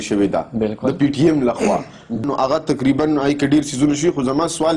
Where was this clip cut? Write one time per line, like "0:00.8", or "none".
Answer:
0:02.2